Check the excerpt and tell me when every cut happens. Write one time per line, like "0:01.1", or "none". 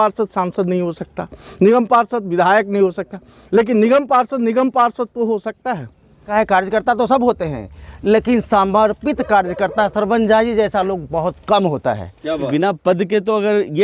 0:06.3
0:12.4